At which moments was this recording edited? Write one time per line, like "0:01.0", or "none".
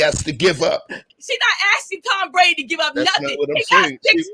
0:01.1